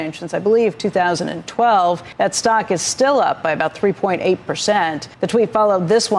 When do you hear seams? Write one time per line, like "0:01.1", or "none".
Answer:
0:02.1
0:05.0

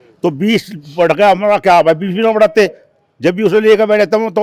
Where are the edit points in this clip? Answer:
none

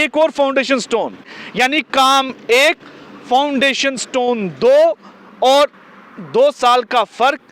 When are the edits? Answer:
0:01.4

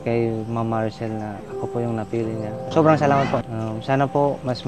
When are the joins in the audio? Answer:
0:02.7
0:03.5

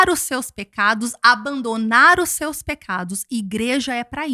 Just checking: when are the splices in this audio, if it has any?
none

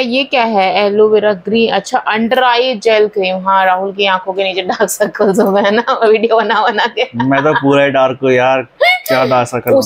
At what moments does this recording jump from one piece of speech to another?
none

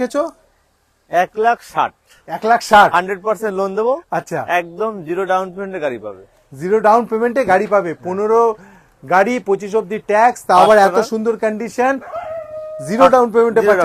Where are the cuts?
none

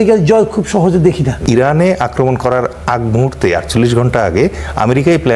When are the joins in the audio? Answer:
0:01.4

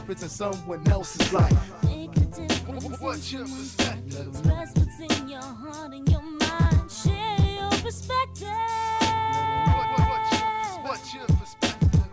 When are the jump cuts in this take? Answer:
0:11.1

